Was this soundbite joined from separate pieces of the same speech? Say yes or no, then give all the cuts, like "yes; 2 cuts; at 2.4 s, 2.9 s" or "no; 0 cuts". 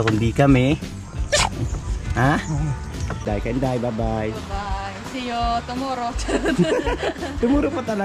yes; 1 cut; at 3.3 s